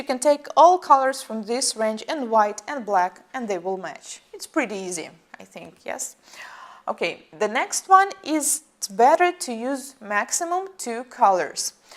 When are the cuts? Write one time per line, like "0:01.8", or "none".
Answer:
0:11.1